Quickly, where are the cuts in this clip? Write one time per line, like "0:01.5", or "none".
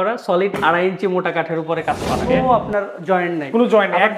0:02.3